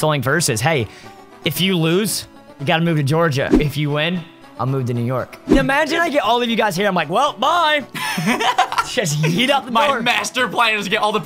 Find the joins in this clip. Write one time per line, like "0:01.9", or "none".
0:03.6
0:05.6